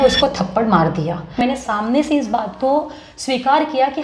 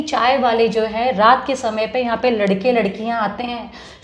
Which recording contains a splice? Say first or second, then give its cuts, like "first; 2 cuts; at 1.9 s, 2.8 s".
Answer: first; 1 cut; at 1.4 s